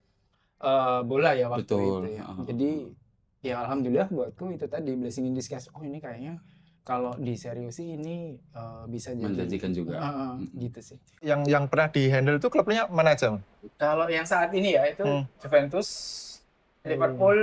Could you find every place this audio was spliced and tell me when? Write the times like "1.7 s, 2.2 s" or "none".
11.2 s